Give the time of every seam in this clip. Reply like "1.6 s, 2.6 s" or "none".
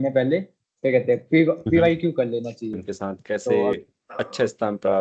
2.9 s